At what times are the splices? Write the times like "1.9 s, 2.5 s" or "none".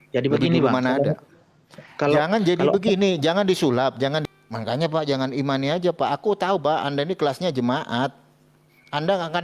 4.2 s